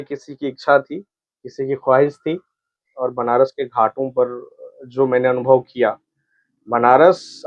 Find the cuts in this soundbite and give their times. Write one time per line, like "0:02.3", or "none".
0:02.8